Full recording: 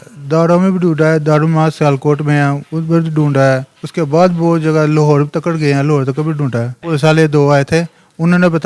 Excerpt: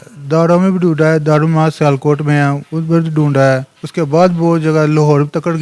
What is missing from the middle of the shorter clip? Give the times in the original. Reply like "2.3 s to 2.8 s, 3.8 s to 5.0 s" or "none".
none